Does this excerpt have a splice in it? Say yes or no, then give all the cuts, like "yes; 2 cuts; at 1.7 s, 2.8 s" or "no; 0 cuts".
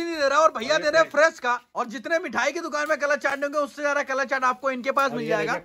no; 0 cuts